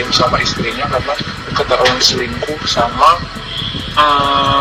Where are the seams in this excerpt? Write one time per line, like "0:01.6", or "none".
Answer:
none